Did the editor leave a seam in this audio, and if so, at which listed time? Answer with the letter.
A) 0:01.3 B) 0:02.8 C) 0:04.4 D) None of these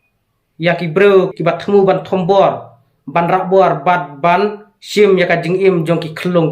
A